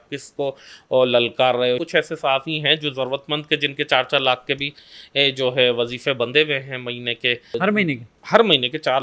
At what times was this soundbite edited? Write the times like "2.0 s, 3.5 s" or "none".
1.8 s, 7.6 s